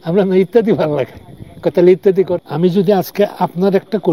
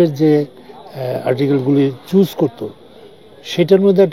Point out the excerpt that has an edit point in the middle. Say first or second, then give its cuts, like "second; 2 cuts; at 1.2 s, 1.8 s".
first; 1 cut; at 2.4 s